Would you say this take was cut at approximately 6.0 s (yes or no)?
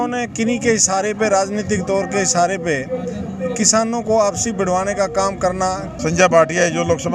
yes